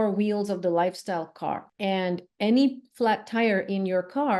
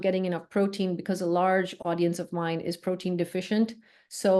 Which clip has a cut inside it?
first; 1 cut; at 1.7 s

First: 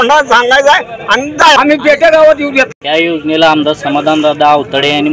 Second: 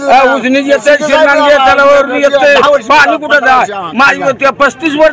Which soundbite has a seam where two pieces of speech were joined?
first; 2 cuts; at 1.6 s, 2.8 s

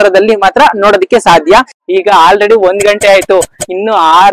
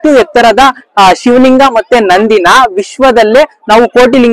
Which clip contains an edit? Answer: first; 1 cut; at 1.8 s

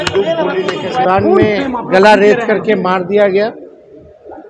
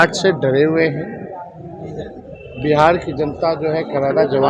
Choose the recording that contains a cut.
first; 1 cut; at 1.1 s

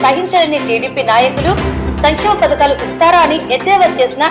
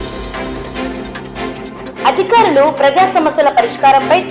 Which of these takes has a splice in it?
second; 1 cut; at 2.0 s

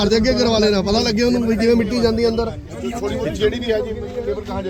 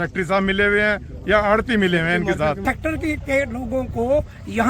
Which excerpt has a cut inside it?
second; 1 cut; at 2.6 s

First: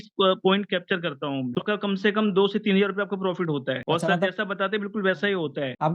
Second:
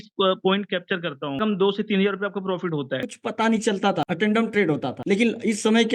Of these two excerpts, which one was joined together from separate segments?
second; 2 cuts; at 1.4 s, 3.0 s

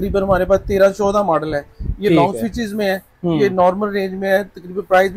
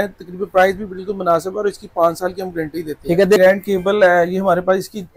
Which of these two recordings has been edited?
second; 1 cut; at 3.4 s

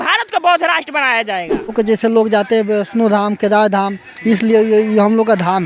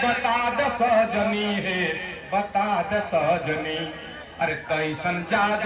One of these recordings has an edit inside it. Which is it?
first; 1 cut; at 1.7 s

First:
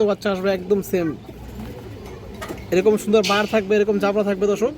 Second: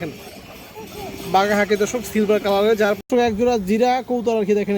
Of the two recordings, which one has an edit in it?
second; 1 cut; at 3.0 s

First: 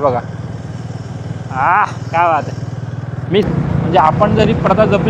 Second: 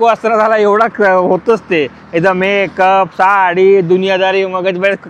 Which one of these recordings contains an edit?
first; 1 cut; at 3.4 s

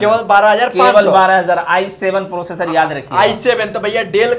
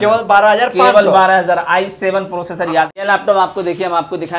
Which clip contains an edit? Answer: second; 1 cut; at 2.9 s

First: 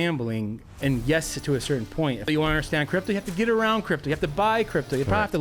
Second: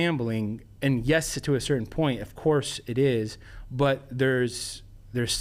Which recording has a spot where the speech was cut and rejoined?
first; 1 cut; at 2.2 s

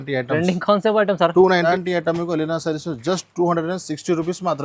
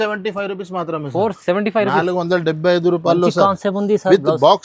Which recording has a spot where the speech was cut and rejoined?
first; 1 cut; at 1.7 s

